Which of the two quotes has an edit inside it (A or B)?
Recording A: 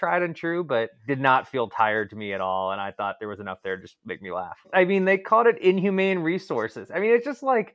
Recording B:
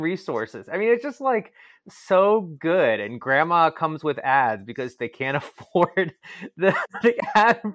A